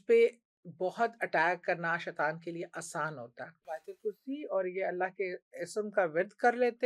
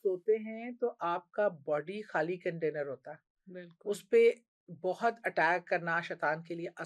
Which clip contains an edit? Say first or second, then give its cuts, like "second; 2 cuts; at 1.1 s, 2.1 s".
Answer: first; 1 cut; at 3.8 s